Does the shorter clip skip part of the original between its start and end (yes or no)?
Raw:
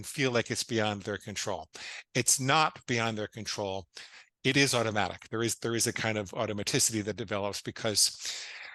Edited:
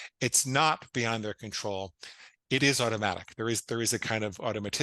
no